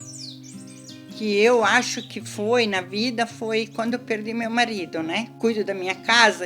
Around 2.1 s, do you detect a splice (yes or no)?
no